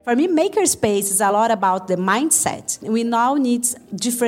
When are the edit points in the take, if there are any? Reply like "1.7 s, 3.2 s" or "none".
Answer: 1.3 s, 2.8 s